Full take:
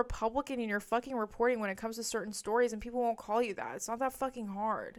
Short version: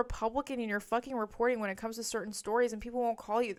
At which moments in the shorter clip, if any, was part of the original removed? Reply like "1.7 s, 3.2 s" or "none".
none